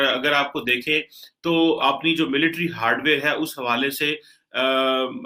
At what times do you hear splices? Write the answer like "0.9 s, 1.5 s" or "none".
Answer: none